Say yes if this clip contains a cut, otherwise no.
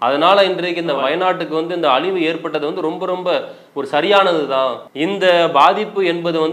yes